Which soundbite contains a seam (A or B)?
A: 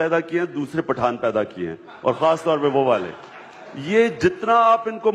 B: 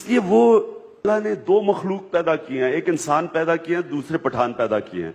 B